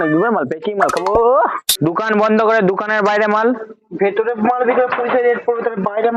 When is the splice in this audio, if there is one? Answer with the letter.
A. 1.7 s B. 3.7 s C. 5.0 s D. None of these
A